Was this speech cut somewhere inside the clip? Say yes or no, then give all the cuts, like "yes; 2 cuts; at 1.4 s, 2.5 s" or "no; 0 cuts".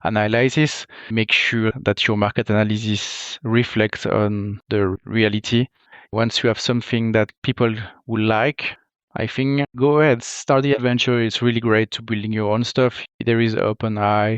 yes; 1 cut; at 10.8 s